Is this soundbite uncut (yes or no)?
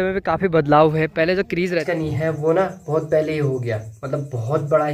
no